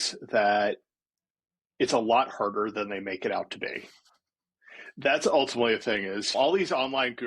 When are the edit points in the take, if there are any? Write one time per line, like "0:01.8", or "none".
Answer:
none